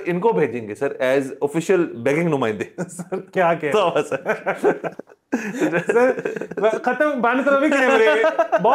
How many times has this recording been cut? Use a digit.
0